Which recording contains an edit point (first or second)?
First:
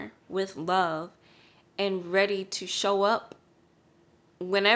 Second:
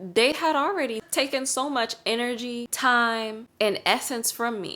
second